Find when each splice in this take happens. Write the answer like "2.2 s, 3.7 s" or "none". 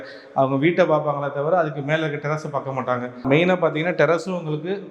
3.2 s

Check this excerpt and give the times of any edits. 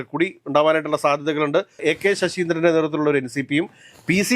1.7 s

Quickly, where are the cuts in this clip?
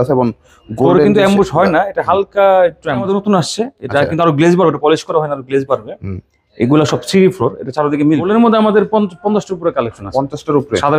3.1 s, 8.3 s

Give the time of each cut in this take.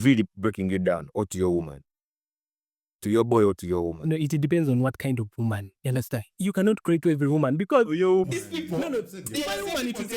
none

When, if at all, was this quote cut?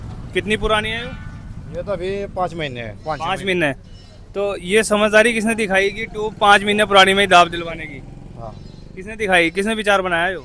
none

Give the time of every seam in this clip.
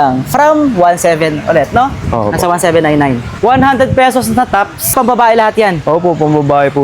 3.3 s, 4.9 s

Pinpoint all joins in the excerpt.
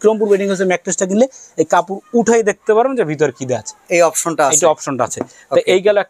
none

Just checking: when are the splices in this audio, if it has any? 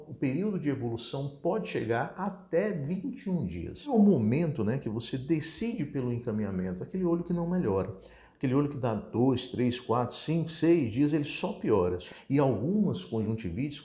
3.9 s, 12.0 s

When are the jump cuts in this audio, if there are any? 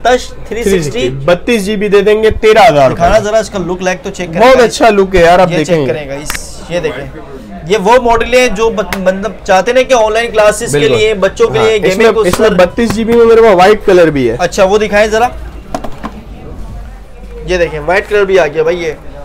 none

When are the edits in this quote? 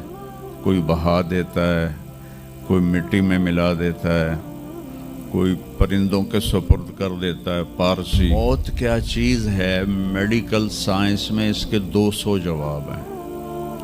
8.3 s

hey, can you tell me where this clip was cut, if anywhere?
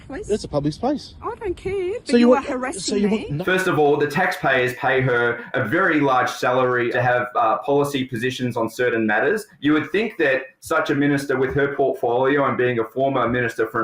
3.3 s, 6.9 s, 9.5 s

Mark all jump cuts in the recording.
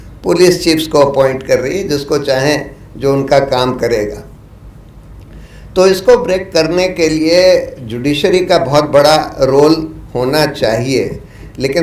none

